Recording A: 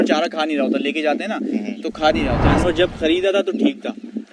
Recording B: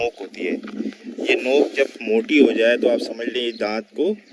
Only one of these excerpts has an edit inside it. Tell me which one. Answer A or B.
A